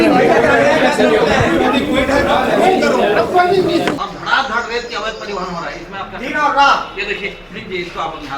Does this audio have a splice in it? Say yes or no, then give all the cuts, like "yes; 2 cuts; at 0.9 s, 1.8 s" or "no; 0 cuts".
yes; 1 cut; at 4.0 s